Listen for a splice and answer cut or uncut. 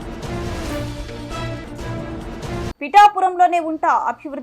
cut